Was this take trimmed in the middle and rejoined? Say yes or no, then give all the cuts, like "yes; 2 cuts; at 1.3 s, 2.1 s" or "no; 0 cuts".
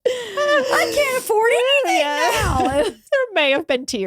yes; 1 cut; at 3.0 s